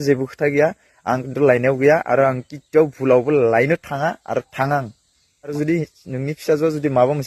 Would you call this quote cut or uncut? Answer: cut